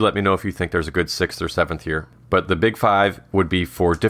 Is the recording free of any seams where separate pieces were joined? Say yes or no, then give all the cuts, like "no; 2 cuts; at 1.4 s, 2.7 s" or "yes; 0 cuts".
no; 1 cut; at 2.1 s